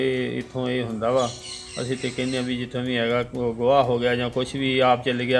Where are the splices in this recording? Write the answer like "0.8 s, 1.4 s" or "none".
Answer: none